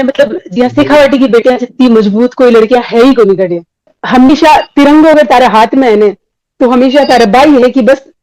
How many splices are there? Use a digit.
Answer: 1